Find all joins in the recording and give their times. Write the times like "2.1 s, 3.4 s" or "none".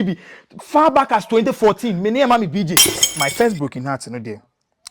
3.2 s